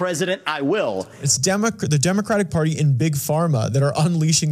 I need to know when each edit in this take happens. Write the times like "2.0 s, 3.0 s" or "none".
1.1 s